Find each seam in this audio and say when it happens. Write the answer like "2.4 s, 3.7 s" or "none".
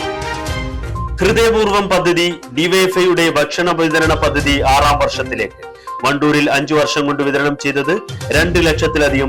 1.0 s